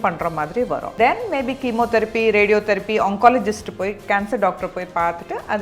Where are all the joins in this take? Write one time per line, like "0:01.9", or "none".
0:01.0